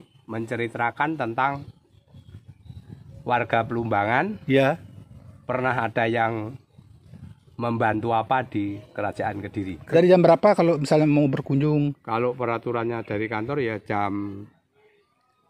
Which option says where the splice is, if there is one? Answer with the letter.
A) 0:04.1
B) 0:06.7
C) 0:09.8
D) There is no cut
C